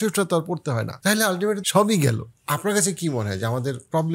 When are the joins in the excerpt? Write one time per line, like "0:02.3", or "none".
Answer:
0:00.9
0:01.6
0:02.4